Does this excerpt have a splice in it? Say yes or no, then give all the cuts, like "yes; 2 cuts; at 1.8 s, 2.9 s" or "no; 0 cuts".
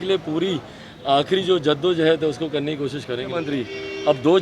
yes; 1 cut; at 3.5 s